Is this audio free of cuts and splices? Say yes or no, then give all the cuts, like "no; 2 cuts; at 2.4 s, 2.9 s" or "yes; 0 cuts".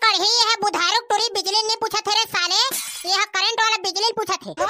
yes; 0 cuts